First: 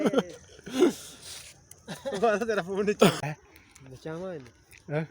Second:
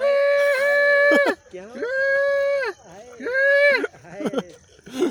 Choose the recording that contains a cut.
first; 1 cut; at 3.2 s

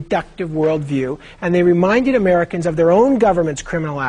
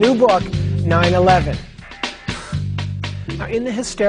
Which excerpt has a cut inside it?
first; 1 cut; at 0.9 s

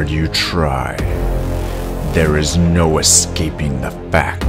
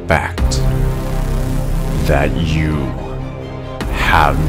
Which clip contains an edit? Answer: first; 1 cut; at 1.2 s

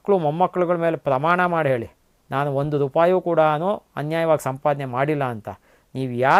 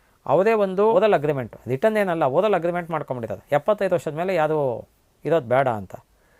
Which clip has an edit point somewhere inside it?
second; 1 cut; at 0.9 s

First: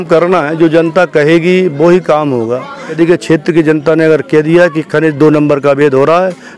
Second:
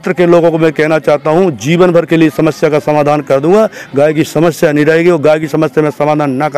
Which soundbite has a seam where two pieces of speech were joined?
first; 1 cut; at 3.0 s

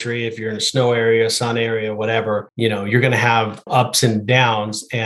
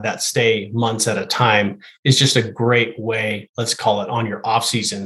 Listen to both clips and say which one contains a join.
first; 2 cuts; at 2.5 s, 3.6 s

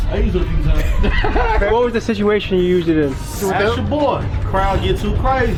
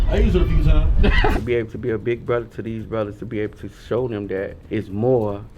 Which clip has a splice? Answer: second; 2 cuts; at 1.3 s, 4.6 s

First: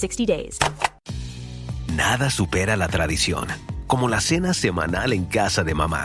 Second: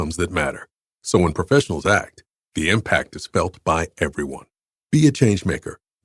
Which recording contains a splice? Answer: first; 1 cut; at 1.0 s

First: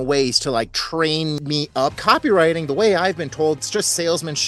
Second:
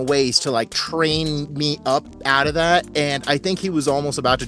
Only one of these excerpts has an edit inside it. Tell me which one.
first; 2 cuts; at 1.8 s, 3.6 s

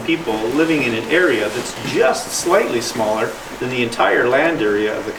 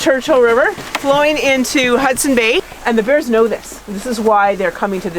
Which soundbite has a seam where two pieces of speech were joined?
second; 1 cut; at 2.7 s

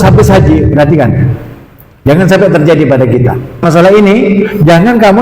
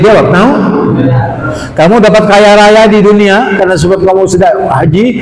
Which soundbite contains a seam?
first; 1 cut; at 3.6 s

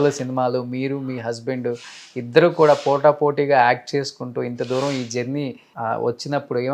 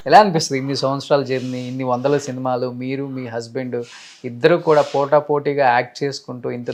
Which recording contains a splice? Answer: first; 1 cut; at 5.6 s

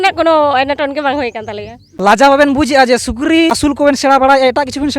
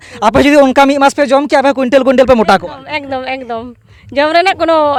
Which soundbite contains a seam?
first; 2 cuts; at 1.9 s, 3.7 s

